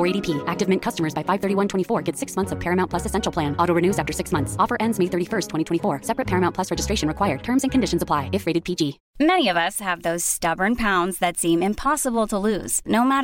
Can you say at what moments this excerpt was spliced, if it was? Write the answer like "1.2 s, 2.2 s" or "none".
9.0 s